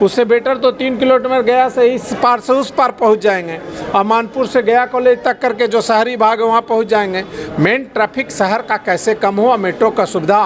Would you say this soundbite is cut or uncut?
uncut